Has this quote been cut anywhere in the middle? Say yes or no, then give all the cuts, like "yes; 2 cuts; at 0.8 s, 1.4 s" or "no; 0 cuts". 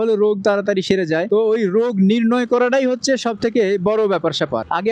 no; 0 cuts